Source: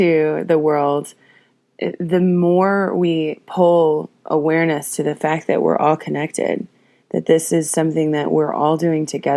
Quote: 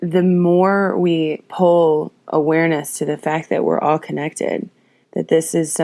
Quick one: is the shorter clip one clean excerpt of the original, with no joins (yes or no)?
yes